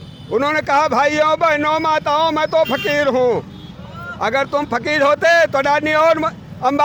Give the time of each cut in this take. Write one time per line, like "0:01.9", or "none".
none